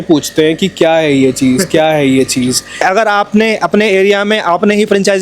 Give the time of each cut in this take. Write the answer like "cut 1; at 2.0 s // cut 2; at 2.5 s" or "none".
cut 1; at 2.8 s